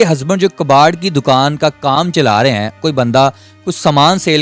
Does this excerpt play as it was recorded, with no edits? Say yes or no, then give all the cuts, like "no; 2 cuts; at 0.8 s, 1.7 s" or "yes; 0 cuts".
no; 1 cut; at 2.8 s